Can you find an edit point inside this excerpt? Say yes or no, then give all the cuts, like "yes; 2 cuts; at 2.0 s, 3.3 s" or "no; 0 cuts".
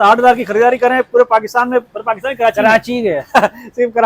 no; 0 cuts